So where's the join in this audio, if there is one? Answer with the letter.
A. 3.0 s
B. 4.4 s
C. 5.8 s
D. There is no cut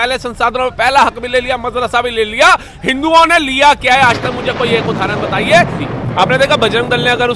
C